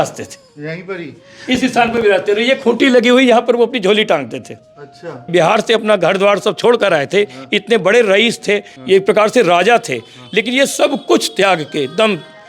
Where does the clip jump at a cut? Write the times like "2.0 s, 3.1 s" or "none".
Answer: 5.2 s, 8.7 s